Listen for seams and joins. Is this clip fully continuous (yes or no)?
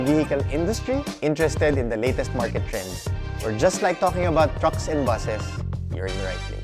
yes